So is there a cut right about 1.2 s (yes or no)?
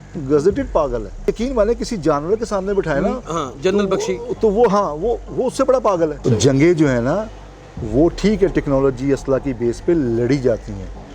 yes